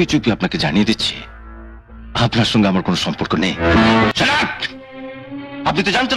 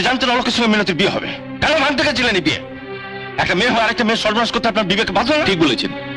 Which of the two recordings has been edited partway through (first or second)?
first